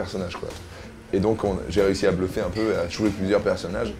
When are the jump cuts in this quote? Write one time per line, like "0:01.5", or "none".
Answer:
0:01.1